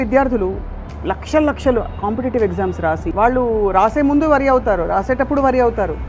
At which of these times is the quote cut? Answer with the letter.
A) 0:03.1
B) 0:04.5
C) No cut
A